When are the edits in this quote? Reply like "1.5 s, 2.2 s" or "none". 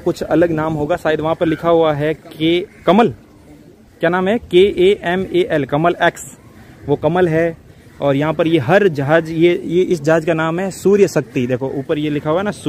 none